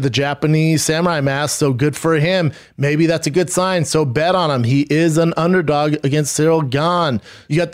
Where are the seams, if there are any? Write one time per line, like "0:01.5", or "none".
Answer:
none

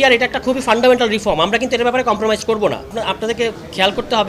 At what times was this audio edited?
0:02.8

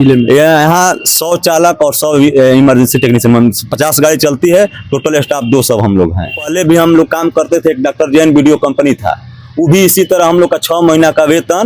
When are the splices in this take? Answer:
0:06.5

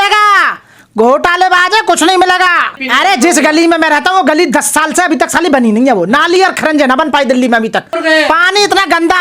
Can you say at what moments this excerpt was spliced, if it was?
0:02.8
0:07.9

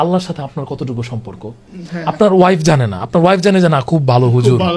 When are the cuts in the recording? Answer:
none

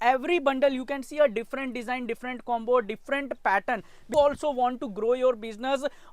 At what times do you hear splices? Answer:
0:04.1

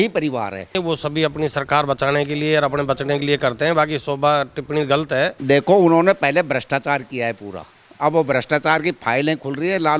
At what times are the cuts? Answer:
0:00.8
0:05.4

